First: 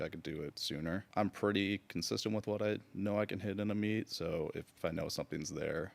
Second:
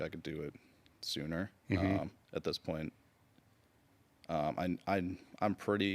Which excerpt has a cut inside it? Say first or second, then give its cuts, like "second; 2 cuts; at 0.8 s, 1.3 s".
first; 2 cuts; at 1.0 s, 4.7 s